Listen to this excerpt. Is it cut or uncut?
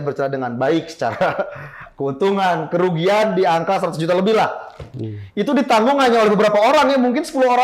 uncut